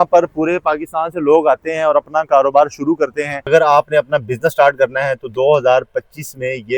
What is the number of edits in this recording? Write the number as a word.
one